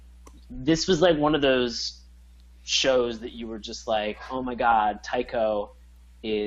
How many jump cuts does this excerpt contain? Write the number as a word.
zero